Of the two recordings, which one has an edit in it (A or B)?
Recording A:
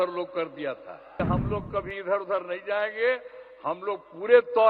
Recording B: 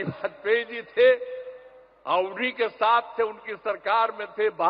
A